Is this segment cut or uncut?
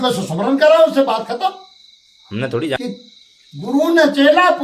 cut